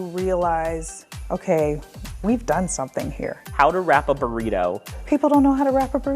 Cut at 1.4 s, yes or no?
no